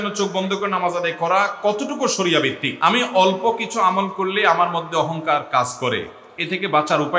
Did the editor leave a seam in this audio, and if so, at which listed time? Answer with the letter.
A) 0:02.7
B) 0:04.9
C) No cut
A